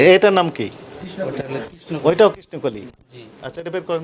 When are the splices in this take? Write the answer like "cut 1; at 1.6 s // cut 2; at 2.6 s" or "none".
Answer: none